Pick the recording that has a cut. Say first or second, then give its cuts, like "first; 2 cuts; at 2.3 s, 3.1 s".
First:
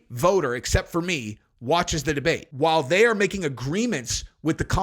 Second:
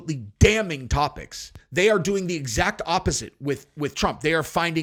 first; 1 cut; at 2.5 s